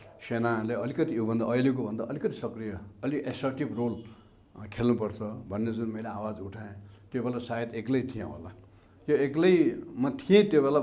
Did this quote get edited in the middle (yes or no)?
no